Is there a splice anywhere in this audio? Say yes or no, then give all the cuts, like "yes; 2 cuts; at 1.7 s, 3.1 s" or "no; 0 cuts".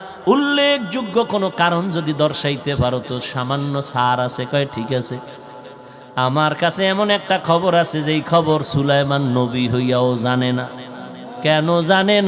no; 0 cuts